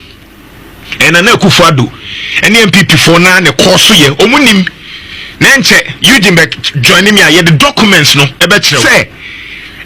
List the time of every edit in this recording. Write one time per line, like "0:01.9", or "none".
0:08.8